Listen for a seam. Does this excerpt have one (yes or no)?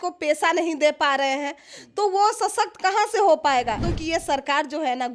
yes